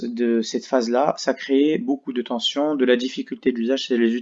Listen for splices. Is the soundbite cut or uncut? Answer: uncut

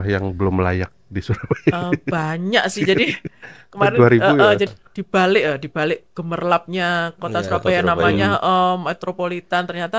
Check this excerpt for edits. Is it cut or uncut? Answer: cut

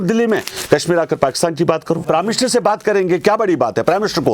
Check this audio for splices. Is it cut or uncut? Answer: cut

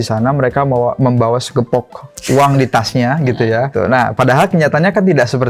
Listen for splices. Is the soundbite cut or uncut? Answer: cut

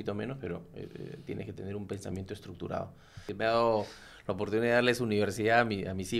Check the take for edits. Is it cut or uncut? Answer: cut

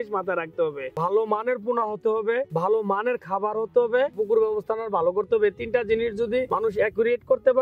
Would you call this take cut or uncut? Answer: cut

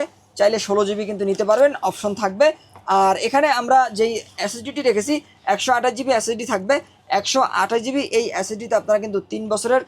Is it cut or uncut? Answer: uncut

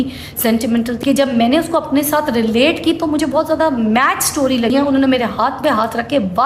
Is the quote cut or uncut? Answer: cut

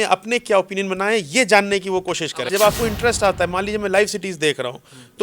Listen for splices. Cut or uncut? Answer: cut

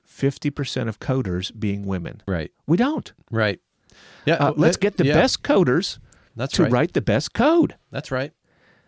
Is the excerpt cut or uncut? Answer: cut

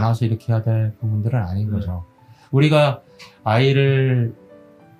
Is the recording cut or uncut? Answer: uncut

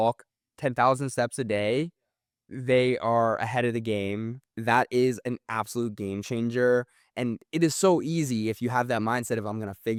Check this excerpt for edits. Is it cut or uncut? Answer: uncut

